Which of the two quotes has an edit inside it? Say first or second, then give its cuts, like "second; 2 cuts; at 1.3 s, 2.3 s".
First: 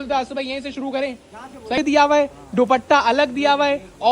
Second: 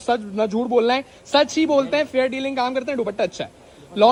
first; 1 cut; at 1.8 s